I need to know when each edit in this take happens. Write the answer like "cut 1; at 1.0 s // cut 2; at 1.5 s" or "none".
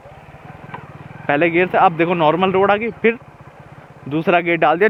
none

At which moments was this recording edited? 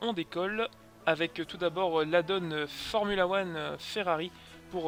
none

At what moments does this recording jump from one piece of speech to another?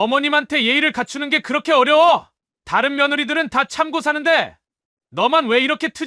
none

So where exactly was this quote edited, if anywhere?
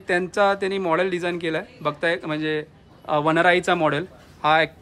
none

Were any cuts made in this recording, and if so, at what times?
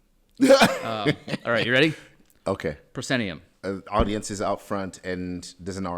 cut 1; at 3.5 s

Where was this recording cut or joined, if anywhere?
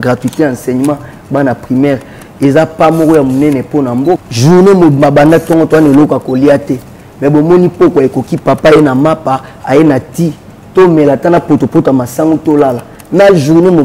cut 1; at 4.3 s

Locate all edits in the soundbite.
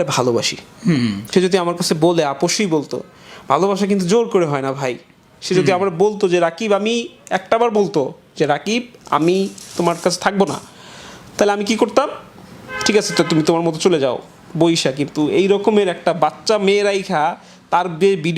cut 1; at 1.2 s

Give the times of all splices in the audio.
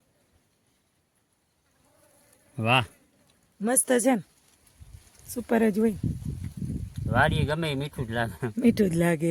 none

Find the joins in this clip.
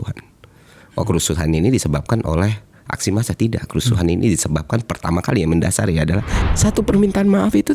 cut 1; at 6.3 s

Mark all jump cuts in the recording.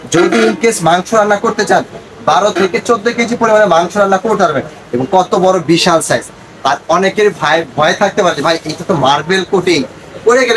none

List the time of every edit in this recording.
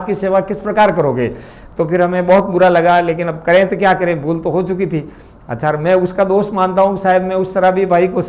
none

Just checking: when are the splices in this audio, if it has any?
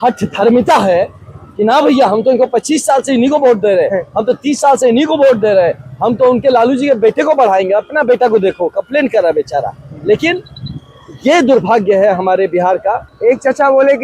cut 1; at 13.1 s

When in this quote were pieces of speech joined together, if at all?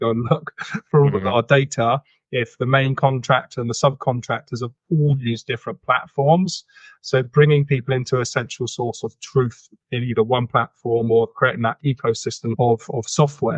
cut 1; at 12.5 s

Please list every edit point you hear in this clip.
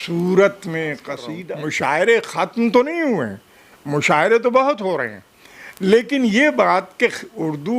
cut 1; at 1.3 s

